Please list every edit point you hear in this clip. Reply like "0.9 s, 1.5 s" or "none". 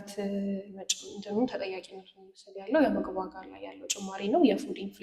none